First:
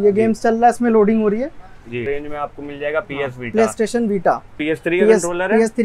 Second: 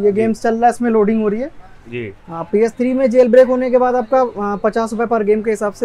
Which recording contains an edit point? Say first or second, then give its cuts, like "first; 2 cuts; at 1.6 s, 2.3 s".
first; 2 cuts; at 2.0 s, 4.6 s